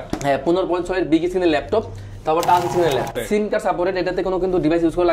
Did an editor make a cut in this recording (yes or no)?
yes